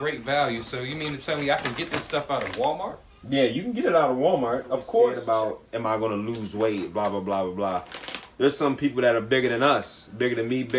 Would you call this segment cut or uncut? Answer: cut